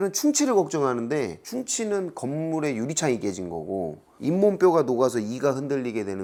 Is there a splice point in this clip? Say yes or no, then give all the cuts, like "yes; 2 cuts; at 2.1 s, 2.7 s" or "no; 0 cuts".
no; 0 cuts